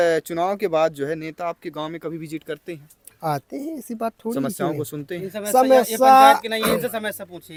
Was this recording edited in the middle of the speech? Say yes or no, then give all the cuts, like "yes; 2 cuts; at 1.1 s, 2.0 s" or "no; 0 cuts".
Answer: no; 0 cuts